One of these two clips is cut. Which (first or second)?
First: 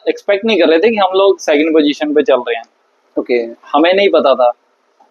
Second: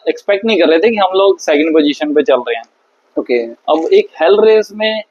second